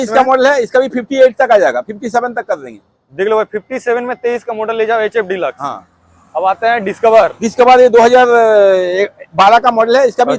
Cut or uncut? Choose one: uncut